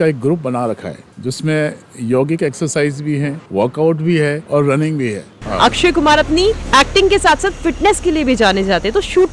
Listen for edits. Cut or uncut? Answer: cut